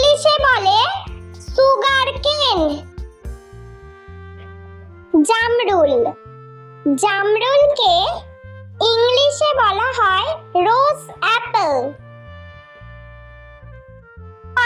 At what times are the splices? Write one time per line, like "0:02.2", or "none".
none